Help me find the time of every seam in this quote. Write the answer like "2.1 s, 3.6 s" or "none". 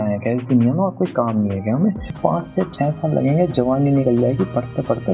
2.1 s